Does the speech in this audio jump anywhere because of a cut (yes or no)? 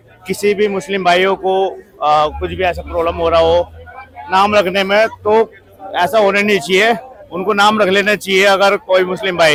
no